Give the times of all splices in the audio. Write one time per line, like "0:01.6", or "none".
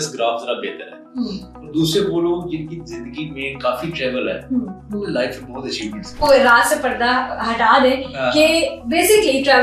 0:06.2